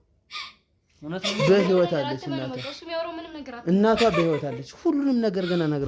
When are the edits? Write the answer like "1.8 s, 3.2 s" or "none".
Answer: none